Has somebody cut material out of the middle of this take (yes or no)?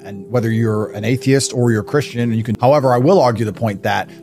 yes